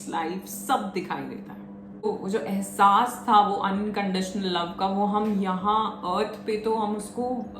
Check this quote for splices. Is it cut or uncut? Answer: cut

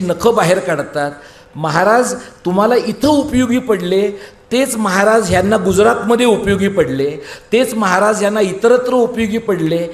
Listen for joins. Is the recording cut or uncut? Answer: uncut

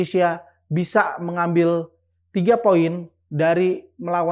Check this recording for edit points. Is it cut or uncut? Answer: uncut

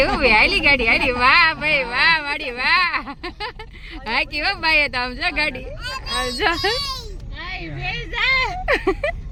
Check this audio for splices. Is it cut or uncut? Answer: uncut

